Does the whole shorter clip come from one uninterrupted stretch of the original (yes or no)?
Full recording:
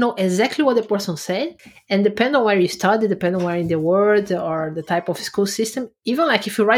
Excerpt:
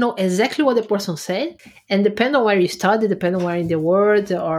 yes